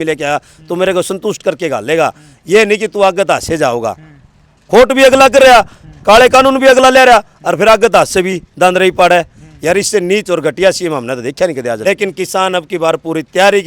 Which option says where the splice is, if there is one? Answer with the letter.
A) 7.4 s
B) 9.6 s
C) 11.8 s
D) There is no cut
C